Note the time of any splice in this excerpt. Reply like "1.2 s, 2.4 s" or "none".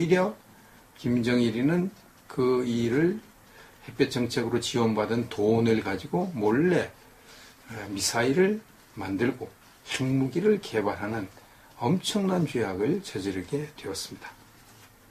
6.1 s

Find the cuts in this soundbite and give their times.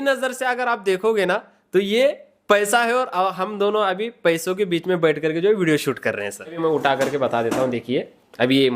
6.5 s

